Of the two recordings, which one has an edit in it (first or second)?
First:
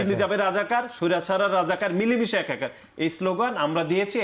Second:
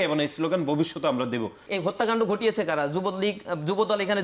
second